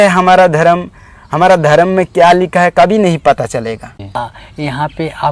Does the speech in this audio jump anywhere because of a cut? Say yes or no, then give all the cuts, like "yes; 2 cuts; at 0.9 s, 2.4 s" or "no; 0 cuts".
yes; 1 cut; at 4.2 s